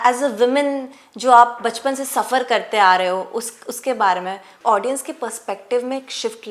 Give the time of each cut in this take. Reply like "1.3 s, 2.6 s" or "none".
4.5 s